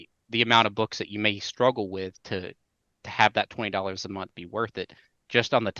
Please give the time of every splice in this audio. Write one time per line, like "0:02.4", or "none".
none